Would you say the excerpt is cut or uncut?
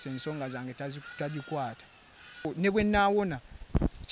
cut